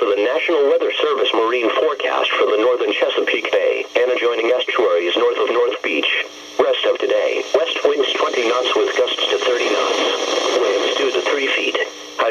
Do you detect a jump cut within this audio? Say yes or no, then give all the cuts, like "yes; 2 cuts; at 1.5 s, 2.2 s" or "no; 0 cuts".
no; 0 cuts